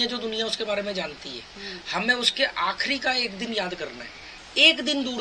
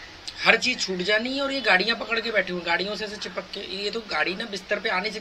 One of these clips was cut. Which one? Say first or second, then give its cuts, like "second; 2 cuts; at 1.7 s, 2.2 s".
first; 1 cut; at 4.3 s